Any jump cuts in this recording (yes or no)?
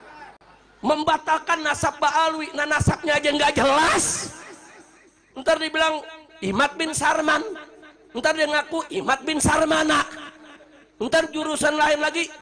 no